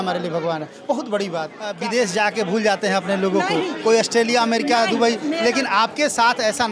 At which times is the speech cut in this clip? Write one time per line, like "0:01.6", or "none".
0:01.6

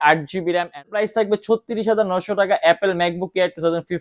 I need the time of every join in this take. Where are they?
0:01.0

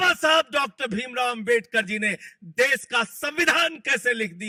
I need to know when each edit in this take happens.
none

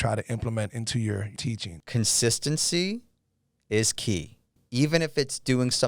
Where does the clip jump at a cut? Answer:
0:01.4
0:04.6

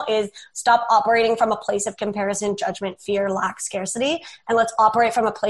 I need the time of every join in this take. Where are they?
none

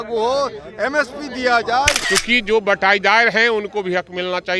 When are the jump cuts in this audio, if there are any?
0:02.0

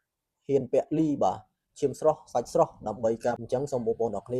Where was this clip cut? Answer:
0:03.4

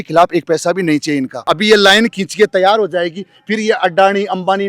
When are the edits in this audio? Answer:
0:01.4

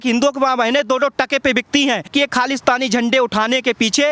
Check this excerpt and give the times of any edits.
0:02.1

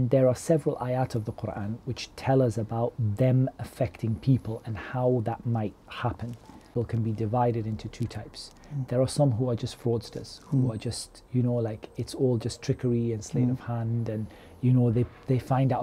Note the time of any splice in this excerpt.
0:06.7

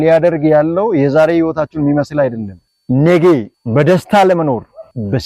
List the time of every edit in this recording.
0:02.7

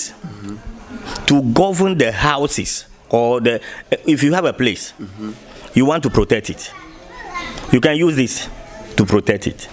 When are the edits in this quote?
none

